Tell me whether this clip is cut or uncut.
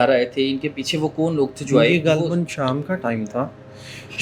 uncut